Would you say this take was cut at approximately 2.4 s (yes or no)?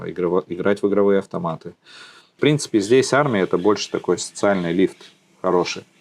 yes